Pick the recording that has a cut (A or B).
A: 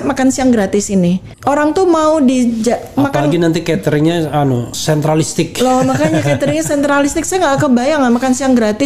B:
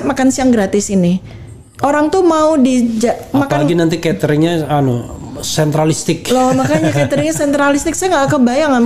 A